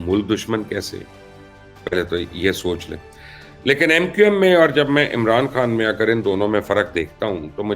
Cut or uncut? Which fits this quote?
uncut